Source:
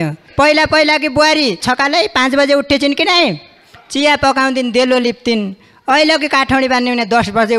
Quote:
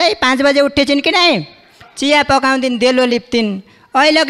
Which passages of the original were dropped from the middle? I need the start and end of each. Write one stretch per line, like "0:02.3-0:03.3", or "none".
none